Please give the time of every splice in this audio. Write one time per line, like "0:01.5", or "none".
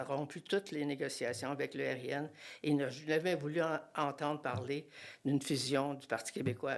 none